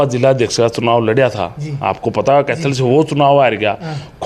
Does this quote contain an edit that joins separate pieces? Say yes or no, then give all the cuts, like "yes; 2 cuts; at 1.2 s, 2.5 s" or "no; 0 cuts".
no; 0 cuts